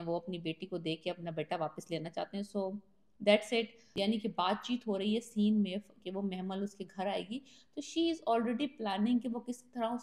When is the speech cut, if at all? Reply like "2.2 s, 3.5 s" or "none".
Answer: 3.8 s